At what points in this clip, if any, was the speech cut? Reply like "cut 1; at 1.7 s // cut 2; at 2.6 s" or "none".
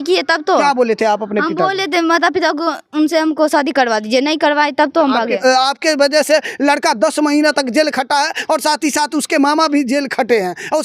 cut 1; at 5.4 s